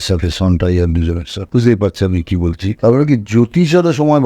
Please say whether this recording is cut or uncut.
cut